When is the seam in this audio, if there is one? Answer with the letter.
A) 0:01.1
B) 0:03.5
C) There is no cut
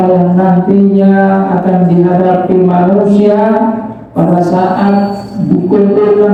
C